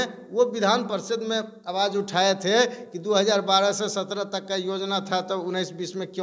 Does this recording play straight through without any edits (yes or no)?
yes